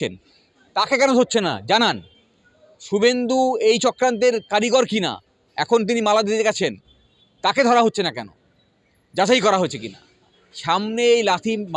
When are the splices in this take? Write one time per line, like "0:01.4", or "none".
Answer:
0:10.5